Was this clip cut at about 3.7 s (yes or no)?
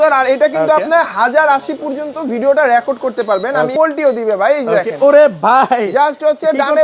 yes